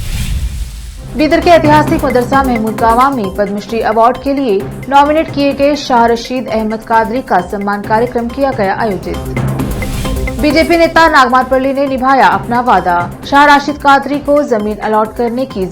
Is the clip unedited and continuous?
no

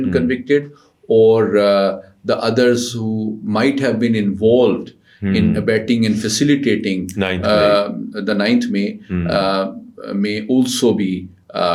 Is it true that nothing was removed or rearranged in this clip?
yes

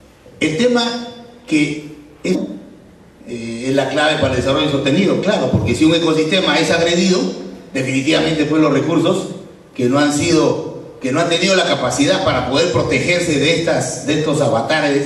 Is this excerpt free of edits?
yes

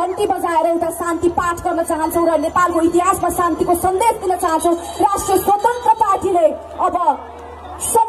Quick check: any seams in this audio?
no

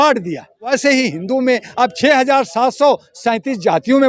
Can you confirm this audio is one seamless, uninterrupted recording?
no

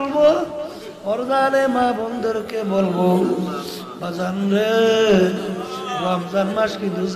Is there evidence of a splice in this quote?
no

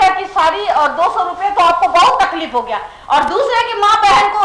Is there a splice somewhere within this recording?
no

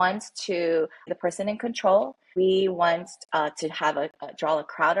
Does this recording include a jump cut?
yes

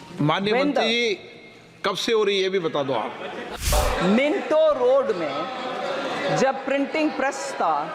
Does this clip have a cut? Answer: yes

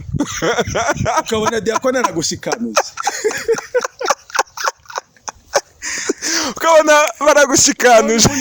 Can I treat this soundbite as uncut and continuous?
yes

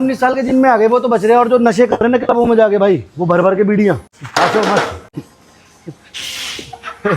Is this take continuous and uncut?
no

